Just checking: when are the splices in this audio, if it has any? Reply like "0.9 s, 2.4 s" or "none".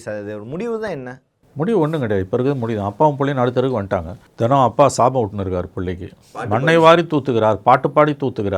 4.2 s